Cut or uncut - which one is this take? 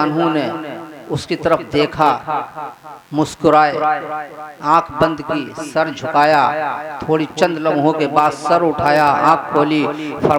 uncut